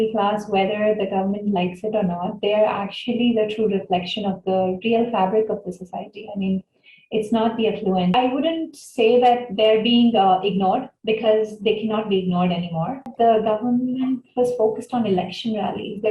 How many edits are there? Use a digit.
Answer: 2